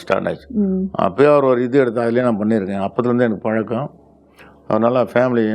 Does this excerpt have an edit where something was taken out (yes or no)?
no